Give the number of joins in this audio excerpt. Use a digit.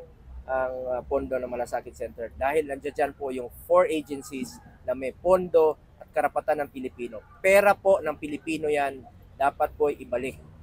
0